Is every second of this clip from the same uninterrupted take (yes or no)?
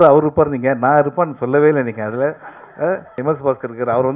no